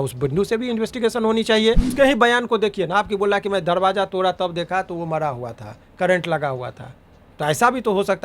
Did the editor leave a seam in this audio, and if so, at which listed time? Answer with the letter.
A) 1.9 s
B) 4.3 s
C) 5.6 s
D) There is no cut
A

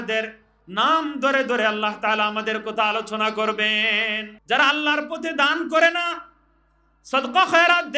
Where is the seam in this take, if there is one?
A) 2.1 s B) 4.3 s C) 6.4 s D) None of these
B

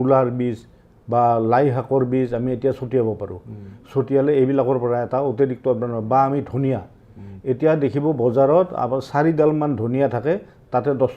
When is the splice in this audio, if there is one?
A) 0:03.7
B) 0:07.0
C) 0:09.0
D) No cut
D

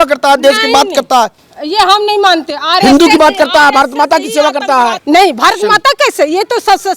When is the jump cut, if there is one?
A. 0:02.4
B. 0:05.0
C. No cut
B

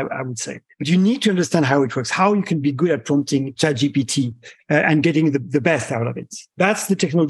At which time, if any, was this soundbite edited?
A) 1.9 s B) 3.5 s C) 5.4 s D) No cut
B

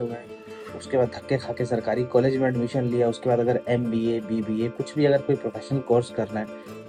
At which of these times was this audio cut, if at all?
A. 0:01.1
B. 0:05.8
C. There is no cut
C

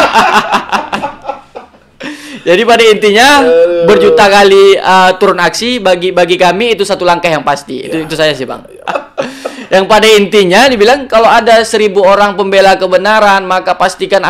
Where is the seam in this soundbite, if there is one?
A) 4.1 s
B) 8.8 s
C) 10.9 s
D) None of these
B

